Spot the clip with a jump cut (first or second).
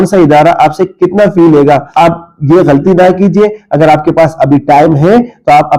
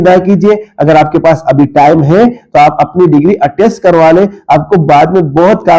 first